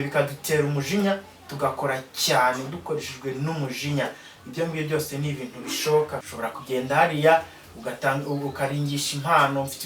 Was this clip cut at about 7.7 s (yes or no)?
no